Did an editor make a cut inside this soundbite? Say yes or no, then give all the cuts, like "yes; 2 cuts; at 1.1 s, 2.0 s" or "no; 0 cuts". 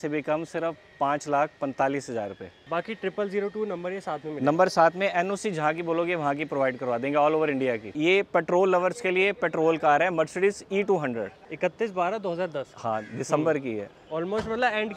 yes; 3 cuts; at 2.6 s, 7.9 s, 11.4 s